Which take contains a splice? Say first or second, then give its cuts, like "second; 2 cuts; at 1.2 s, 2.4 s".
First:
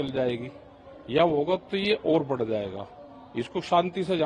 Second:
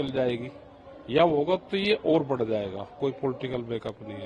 second; 1 cut; at 2.9 s